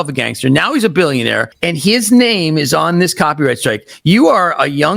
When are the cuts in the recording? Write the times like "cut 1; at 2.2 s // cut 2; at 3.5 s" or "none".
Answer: cut 1; at 1.5 s